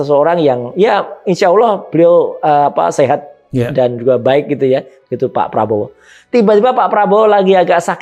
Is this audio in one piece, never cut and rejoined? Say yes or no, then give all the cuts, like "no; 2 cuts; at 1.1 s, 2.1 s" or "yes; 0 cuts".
yes; 0 cuts